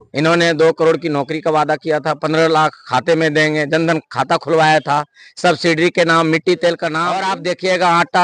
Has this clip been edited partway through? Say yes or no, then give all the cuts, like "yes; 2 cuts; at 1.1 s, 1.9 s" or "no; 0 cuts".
yes; 1 cut; at 7.3 s